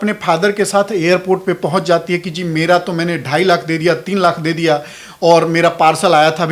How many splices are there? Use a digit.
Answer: 0